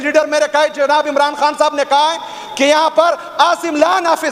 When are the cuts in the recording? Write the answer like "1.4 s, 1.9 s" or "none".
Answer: none